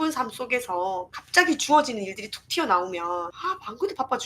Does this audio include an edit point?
yes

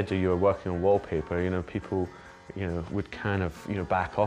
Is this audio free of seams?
yes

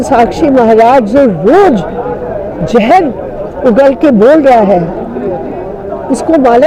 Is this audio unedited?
yes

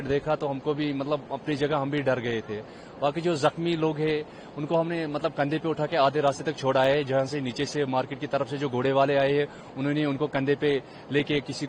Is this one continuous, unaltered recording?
yes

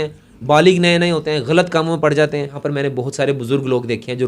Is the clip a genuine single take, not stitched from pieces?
no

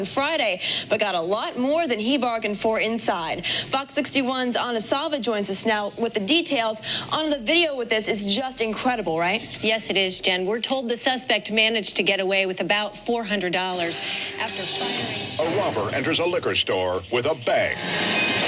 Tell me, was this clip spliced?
yes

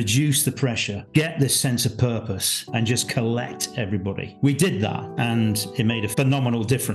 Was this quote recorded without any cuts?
no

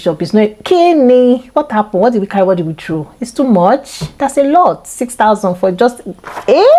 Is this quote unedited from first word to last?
yes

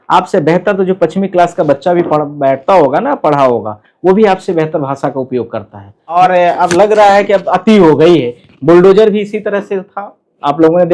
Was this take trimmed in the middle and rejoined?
yes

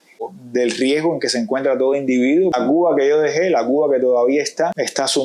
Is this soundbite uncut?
no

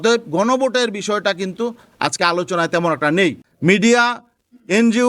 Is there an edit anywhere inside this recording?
yes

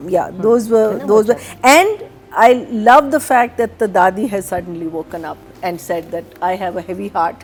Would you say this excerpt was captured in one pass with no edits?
yes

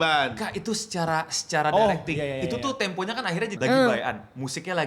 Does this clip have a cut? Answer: yes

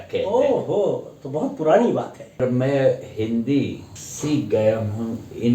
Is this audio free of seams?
no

